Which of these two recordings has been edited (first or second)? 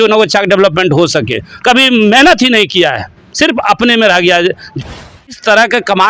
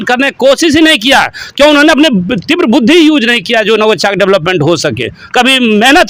first